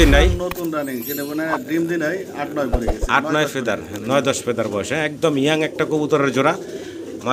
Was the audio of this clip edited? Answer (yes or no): no